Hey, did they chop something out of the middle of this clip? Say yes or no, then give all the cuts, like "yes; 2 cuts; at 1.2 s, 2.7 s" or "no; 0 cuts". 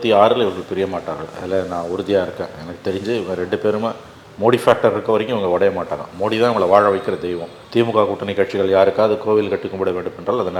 no; 0 cuts